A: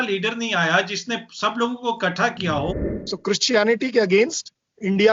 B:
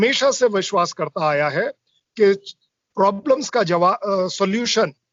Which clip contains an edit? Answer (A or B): A